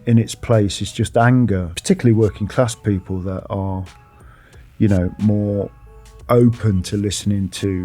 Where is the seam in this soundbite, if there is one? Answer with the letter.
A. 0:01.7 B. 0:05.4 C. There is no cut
A